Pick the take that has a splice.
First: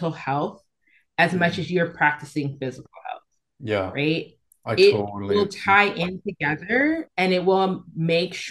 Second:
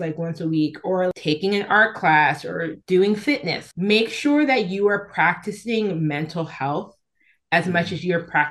second; 3 cuts; at 1.1 s, 2.8 s, 3.6 s

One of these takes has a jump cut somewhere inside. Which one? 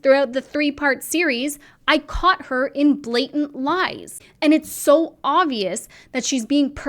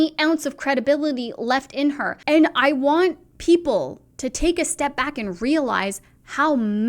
second; 1 cut; at 2.1 s

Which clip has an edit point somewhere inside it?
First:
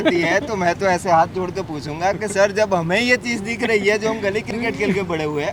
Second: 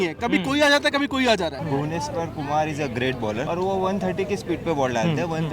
second; 2 cuts; at 1.6 s, 3.4 s

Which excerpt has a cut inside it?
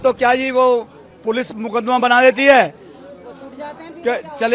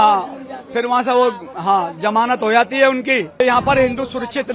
second; 1 cut; at 3.4 s

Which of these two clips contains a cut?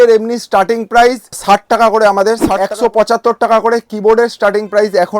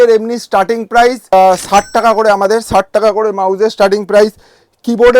first; 2 cuts; at 1.3 s, 2.7 s

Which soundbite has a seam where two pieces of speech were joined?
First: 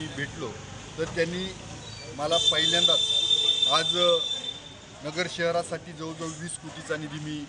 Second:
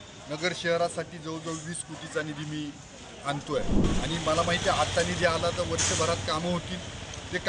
second; 1 cut; at 3.8 s

